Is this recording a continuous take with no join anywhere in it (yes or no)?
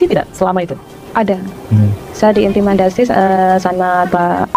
yes